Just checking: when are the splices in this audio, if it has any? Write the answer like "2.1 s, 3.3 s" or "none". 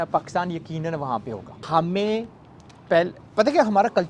1.5 s